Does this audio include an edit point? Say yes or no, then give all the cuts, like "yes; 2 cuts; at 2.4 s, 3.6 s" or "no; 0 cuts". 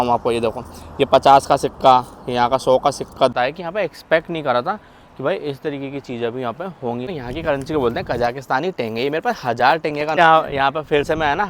yes; 3 cuts; at 3.3 s, 7.2 s, 10.2 s